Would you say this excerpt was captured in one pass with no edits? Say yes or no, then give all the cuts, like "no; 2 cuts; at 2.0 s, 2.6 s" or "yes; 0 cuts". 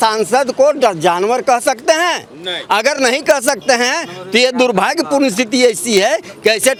yes; 0 cuts